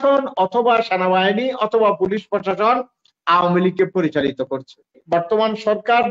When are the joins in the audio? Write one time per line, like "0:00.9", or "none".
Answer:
0:05.0